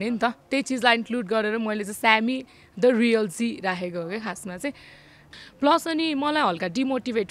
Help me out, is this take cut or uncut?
cut